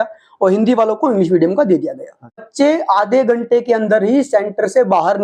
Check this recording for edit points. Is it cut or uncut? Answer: cut